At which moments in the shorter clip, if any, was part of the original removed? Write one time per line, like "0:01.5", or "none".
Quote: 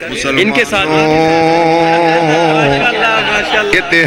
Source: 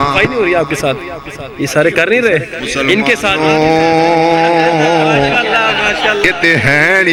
none